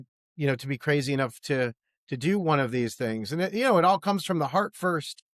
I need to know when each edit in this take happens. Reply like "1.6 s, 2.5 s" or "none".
none